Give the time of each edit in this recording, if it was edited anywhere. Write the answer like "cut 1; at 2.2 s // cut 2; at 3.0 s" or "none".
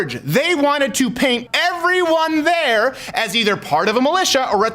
cut 1; at 1.4 s